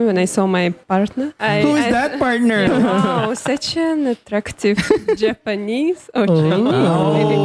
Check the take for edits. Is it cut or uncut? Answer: cut